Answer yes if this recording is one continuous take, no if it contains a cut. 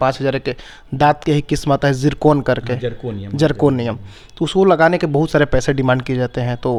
yes